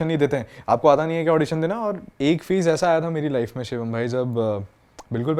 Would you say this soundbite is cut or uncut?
cut